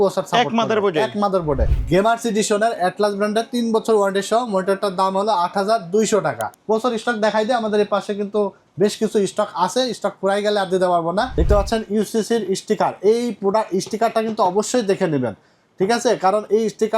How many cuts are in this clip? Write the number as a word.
three